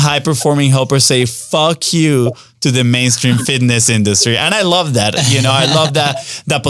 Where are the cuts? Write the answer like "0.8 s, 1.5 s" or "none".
none